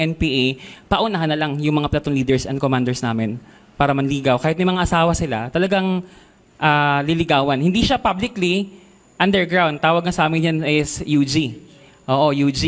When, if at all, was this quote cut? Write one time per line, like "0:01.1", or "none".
none